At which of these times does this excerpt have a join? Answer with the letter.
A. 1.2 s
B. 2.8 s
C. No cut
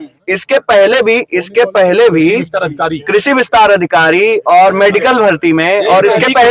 C